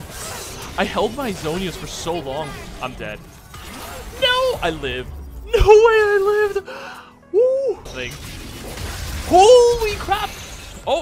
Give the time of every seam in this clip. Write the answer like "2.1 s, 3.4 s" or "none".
7.9 s